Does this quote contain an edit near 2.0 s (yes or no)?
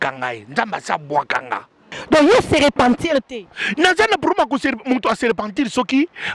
yes